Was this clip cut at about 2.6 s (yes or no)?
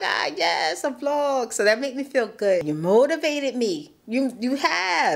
yes